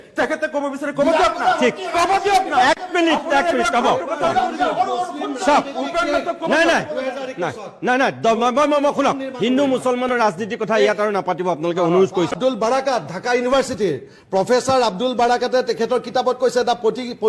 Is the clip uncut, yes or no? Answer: yes